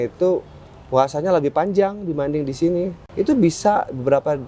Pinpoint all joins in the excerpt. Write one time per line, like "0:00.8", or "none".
0:03.1